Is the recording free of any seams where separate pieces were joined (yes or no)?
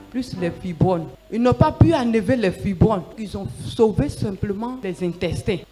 no